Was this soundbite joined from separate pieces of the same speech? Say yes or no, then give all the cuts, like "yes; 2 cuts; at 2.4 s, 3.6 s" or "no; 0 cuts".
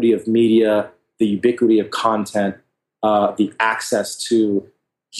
no; 0 cuts